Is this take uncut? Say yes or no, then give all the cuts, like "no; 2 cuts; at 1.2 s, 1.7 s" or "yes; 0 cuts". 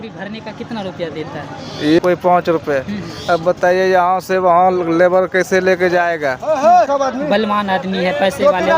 no; 2 cuts; at 2.0 s, 6.9 s